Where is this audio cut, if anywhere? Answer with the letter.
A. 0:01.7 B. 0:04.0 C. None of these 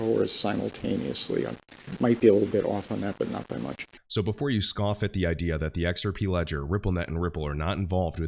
B